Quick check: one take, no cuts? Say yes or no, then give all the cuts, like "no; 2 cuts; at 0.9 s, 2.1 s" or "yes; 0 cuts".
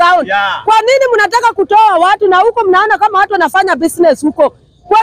yes; 0 cuts